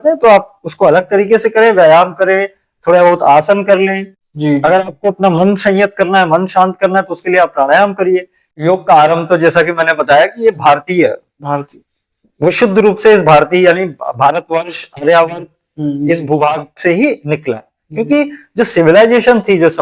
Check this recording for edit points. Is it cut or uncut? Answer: cut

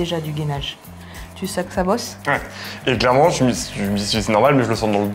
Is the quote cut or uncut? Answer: uncut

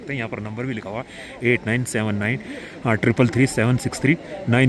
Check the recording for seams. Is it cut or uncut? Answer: uncut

